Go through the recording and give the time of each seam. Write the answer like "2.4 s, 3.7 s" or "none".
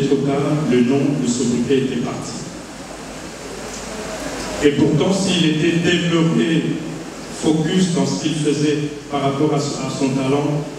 none